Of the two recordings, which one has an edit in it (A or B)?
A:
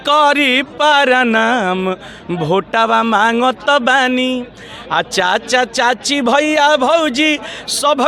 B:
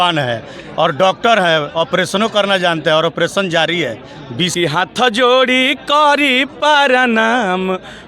B